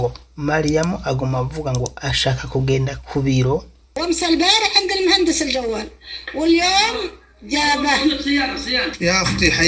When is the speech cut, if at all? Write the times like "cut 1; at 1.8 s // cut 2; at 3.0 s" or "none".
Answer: cut 1; at 3.8 s